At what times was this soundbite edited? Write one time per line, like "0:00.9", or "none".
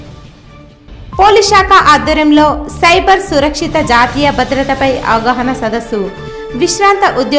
0:00.9